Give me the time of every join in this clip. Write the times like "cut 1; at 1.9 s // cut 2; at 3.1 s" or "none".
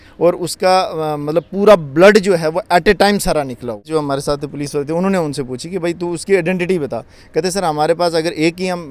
cut 1; at 3.9 s